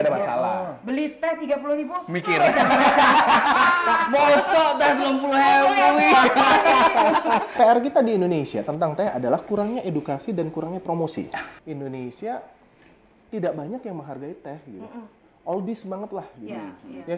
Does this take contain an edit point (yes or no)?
yes